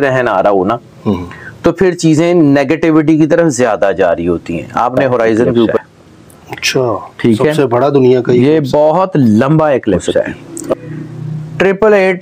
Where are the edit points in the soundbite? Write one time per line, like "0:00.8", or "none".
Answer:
0:05.8
0:10.7